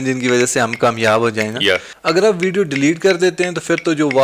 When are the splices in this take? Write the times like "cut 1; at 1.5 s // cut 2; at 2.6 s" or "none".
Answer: cut 1; at 1.9 s